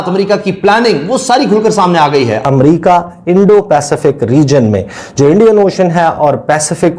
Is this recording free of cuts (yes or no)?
no